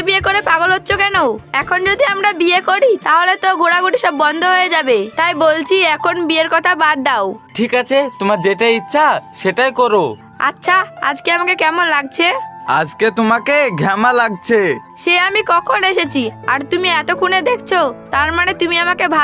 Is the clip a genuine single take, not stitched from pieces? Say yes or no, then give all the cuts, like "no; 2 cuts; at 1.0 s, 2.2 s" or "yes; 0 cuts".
yes; 0 cuts